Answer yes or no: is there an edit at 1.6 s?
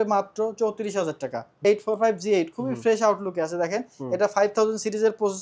yes